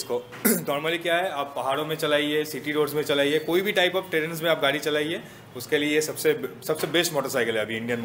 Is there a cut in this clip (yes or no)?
no